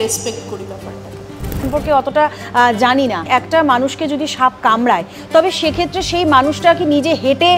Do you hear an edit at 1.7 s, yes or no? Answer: yes